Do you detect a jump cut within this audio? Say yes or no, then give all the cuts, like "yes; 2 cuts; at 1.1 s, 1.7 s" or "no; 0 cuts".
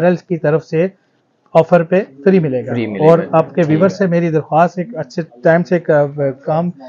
no; 0 cuts